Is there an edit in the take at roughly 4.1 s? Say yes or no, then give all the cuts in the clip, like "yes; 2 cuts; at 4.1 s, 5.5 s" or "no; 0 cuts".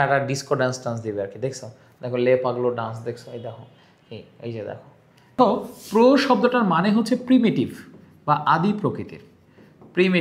no; 1 cut; at 5.3 s